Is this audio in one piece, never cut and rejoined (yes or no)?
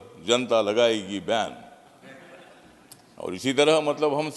yes